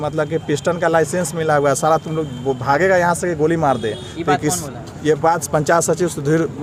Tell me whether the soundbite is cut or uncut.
uncut